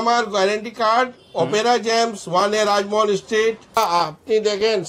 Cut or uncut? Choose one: cut